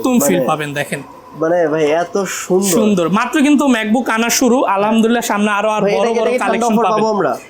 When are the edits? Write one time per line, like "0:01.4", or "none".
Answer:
none